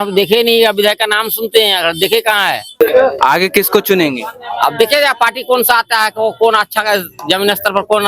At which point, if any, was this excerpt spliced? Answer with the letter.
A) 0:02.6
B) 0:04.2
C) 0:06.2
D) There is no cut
A